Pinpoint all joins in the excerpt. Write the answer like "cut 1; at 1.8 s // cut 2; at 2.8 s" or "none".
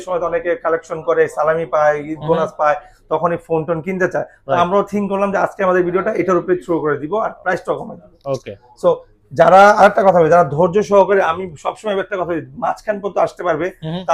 none